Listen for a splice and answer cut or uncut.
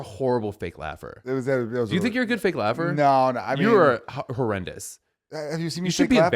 uncut